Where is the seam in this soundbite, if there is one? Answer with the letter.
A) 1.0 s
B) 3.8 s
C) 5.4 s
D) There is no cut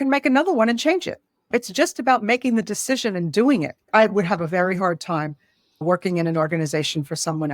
B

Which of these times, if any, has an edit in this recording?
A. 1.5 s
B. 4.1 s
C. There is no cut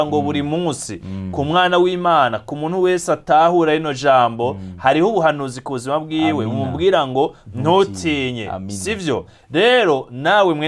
C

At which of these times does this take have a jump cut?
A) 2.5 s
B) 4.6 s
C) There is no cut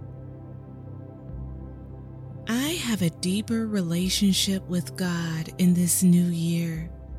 C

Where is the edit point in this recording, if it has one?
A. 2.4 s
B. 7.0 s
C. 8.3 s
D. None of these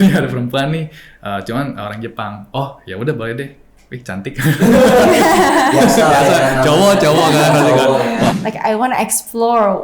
C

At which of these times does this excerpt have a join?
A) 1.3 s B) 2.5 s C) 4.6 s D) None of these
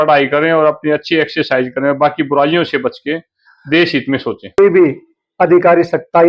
C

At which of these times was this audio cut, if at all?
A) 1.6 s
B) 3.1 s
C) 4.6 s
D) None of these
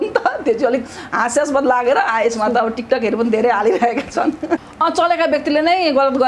C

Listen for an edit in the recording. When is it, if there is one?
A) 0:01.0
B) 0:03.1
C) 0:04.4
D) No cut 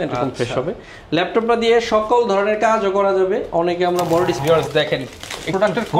C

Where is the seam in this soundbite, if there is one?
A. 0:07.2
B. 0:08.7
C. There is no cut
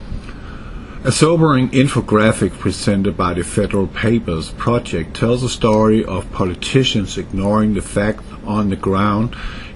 B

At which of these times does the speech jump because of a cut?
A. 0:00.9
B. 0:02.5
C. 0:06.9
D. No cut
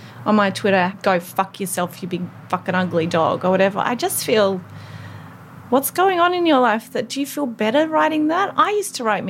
A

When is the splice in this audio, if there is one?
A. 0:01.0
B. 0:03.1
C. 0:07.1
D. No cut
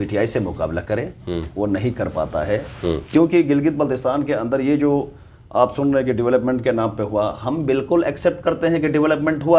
D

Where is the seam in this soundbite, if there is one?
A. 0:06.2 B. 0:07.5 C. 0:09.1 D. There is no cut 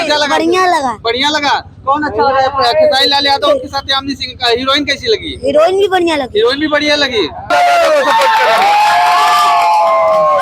B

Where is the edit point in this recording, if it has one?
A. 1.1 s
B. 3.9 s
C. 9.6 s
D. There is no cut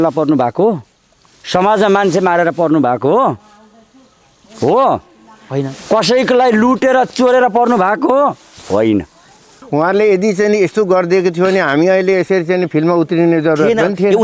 C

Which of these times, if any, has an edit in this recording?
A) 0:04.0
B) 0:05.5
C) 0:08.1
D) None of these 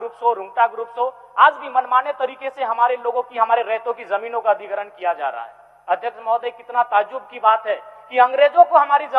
D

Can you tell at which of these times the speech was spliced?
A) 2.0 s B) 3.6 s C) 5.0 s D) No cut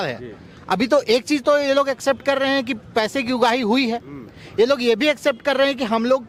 D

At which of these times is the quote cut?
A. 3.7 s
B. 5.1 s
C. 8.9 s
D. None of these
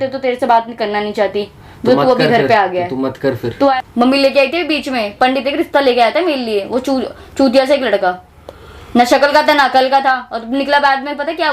A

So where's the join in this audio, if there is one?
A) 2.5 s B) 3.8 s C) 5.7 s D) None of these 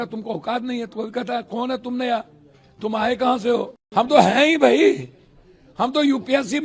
B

